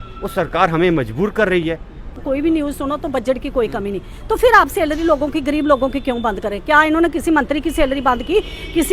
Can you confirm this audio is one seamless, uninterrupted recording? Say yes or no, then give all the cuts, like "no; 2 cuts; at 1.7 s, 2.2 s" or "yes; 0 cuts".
no; 1 cut; at 2.2 s